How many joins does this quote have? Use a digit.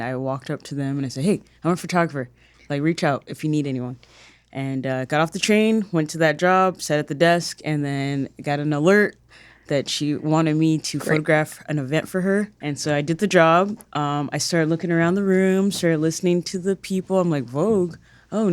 1